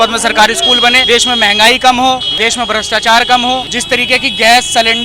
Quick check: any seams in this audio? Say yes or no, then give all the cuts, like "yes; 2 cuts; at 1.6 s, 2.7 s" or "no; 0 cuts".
yes; 3 cuts; at 1.0 s, 2.3 s, 3.7 s